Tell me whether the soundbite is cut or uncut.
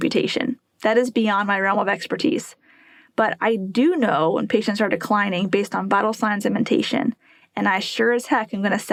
uncut